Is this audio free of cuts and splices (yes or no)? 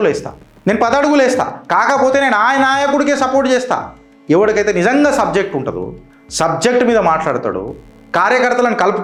yes